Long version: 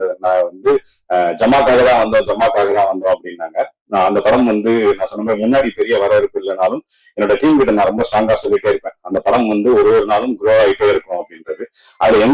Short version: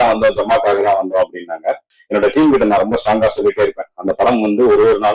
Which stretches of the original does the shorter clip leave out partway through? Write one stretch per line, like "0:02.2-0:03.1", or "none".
0:03.8-0:06.9